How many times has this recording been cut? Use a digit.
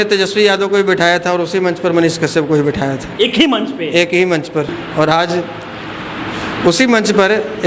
1